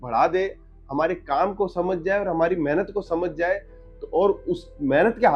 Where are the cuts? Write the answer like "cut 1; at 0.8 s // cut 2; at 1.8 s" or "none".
none